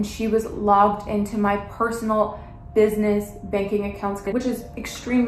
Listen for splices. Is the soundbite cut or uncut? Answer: uncut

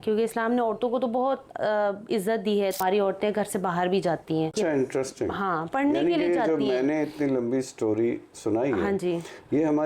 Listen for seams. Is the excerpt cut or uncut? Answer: cut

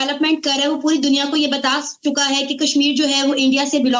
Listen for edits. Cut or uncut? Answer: uncut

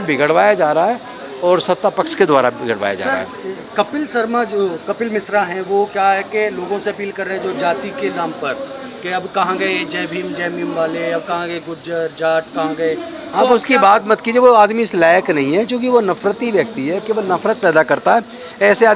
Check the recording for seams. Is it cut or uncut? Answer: uncut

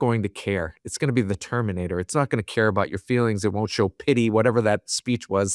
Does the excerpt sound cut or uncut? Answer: uncut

